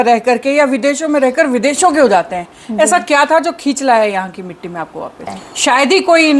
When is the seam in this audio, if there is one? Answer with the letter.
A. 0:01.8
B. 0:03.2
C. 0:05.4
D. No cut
C